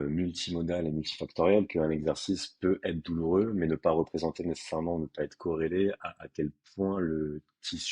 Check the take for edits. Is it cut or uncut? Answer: uncut